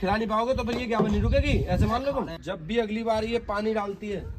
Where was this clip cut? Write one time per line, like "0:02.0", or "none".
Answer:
0:02.4